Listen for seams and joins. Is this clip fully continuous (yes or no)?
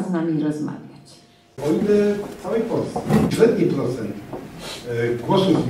no